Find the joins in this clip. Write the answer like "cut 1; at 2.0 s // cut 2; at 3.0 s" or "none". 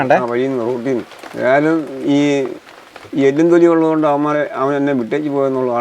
none